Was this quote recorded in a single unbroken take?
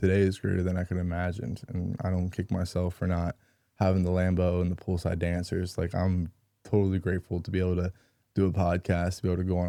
yes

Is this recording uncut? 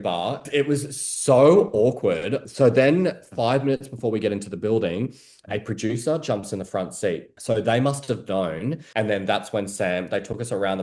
no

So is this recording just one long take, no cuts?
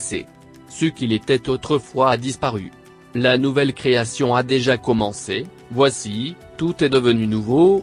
no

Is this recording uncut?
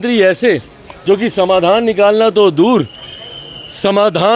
yes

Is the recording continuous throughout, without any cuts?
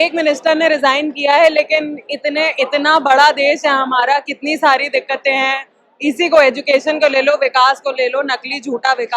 yes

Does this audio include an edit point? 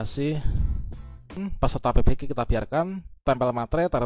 yes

